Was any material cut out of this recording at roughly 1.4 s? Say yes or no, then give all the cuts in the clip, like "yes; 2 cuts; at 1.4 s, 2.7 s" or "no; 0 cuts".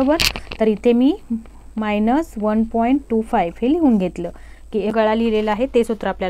no; 1 cut; at 4.9 s